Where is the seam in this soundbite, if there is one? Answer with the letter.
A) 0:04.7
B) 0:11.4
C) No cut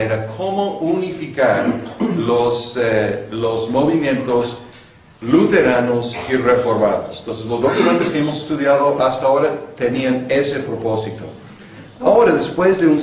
B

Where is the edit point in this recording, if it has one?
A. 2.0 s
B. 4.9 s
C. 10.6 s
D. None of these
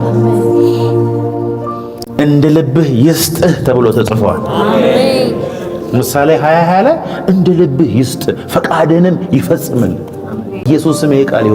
C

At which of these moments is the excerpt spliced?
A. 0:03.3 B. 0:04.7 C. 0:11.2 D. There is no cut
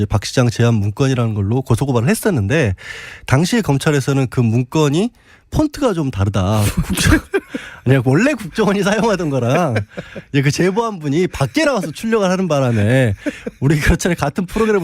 B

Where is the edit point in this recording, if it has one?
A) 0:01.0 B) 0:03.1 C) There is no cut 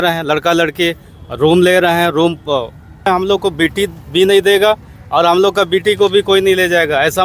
B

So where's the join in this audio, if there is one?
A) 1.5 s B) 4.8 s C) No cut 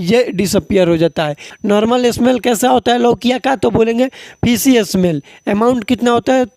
A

